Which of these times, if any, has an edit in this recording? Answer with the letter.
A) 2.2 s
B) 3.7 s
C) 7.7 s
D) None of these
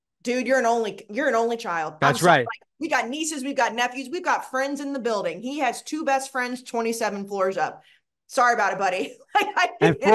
D